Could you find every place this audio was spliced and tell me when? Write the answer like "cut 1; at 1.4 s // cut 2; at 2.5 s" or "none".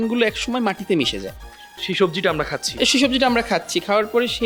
none